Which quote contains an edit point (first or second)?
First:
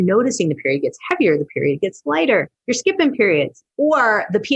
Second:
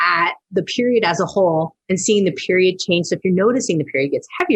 first